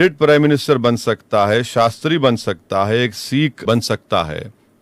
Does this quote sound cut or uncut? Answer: cut